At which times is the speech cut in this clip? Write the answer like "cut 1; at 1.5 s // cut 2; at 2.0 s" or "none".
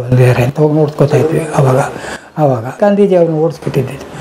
cut 1; at 2.8 s